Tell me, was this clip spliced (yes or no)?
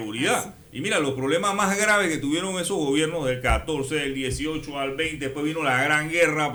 no